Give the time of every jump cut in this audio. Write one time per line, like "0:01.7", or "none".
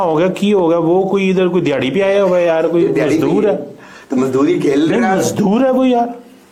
none